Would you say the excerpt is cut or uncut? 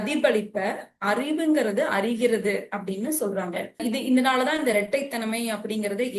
uncut